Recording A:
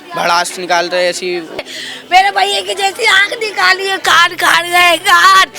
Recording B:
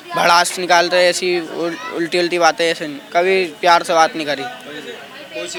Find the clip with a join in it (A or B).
A